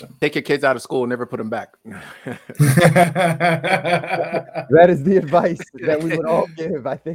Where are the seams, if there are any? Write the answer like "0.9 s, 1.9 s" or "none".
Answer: none

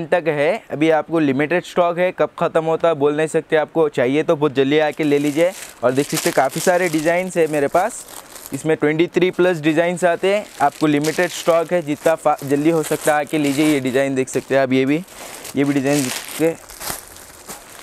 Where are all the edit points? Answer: none

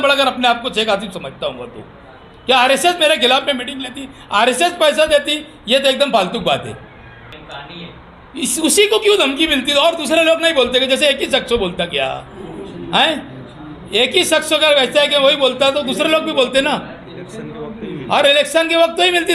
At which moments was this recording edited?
7.3 s

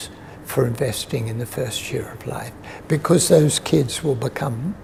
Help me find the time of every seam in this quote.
none

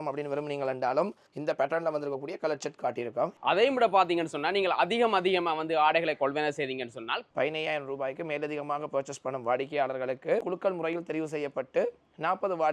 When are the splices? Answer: 1.3 s, 3.3 s, 7.3 s, 10.4 s

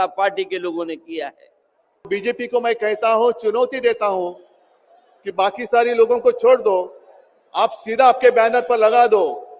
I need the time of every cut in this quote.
2.1 s

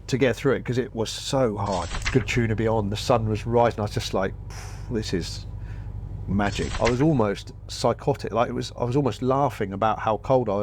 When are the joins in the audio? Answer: 1.9 s, 6.7 s

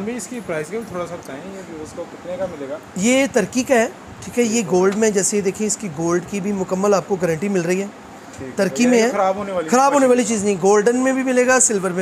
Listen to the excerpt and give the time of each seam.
none

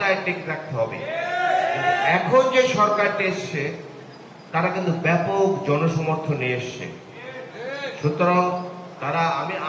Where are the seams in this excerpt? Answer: none

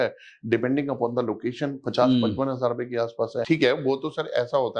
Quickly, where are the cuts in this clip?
3.4 s

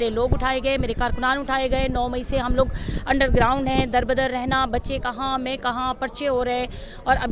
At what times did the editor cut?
none

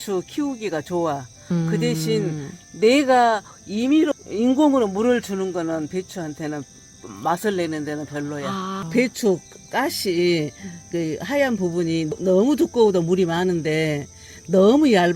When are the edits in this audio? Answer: 4.1 s, 8.8 s

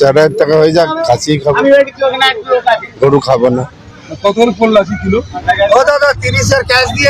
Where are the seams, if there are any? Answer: 5.4 s

